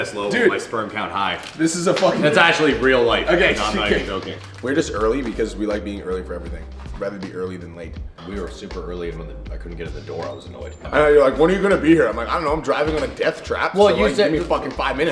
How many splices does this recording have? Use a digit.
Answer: 0